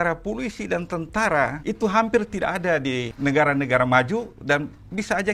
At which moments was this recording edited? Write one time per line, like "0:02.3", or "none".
0:01.6
0:03.1